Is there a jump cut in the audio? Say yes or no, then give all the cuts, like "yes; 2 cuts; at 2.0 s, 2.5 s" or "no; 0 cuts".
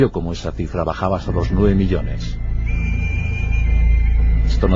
no; 0 cuts